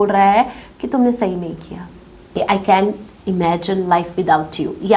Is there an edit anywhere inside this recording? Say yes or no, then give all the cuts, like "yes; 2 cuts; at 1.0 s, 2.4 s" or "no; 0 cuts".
yes; 1 cut; at 2.3 s